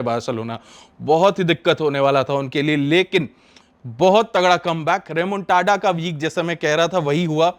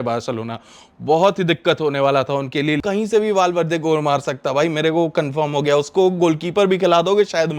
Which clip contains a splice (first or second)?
second